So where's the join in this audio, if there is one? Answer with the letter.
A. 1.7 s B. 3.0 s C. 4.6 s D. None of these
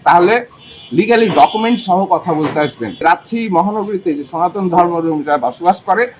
B